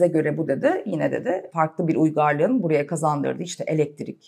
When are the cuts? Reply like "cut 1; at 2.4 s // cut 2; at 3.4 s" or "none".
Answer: cut 1; at 1.5 s